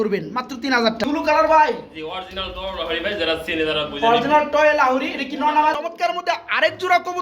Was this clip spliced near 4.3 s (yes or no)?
no